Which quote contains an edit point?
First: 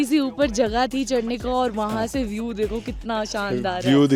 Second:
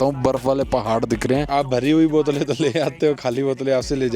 second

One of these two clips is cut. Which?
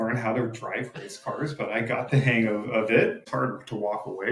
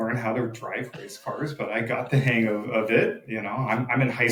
first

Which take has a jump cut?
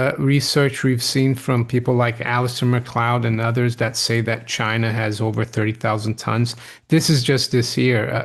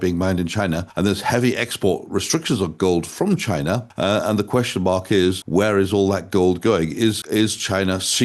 second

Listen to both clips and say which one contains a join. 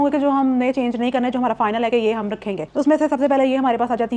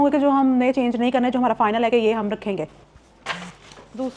second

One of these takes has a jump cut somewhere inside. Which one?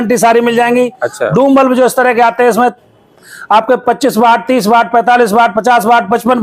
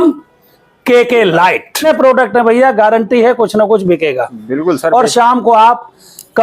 second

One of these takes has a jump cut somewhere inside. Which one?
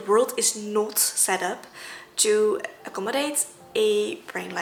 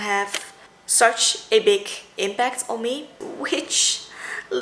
second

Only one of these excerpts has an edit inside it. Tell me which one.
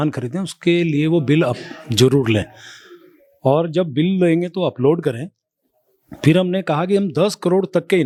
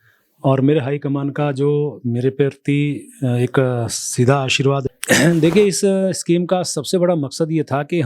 second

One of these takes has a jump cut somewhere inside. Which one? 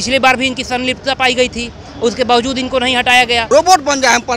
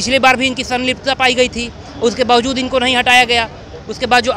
first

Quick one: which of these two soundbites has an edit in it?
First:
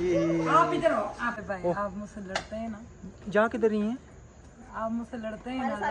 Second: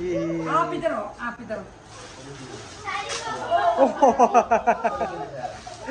first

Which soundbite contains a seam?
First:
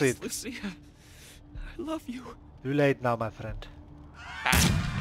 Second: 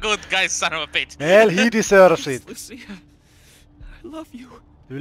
second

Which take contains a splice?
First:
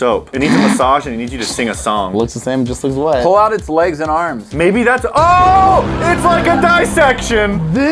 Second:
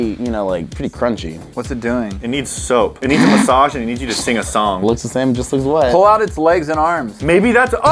second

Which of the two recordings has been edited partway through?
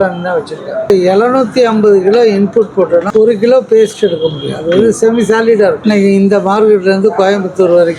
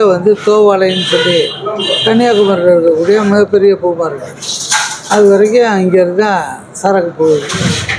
first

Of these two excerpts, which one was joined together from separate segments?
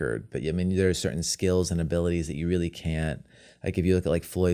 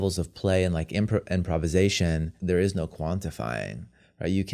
second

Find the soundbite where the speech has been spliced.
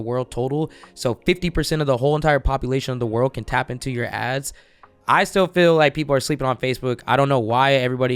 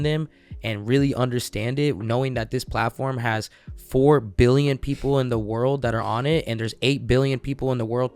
first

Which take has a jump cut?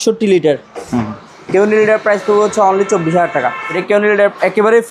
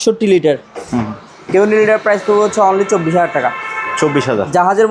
first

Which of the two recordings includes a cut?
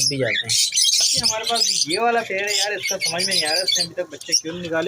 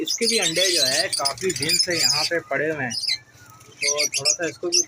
first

